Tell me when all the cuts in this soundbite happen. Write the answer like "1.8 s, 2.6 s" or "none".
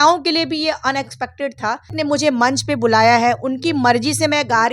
1.9 s